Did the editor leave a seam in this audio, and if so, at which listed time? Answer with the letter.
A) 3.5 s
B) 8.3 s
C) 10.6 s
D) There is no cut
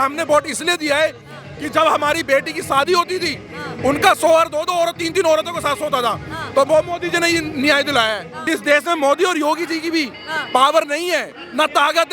B